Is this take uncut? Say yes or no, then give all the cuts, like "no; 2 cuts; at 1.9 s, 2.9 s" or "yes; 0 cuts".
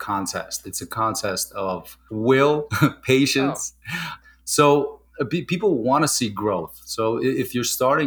no; 1 cut; at 2.0 s